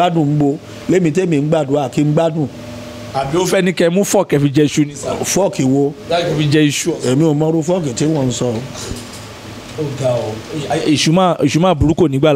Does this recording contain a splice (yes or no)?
no